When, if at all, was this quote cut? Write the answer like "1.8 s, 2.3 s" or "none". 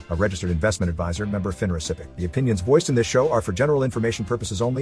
2.1 s